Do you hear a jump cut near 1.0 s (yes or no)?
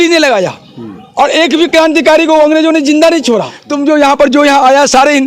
no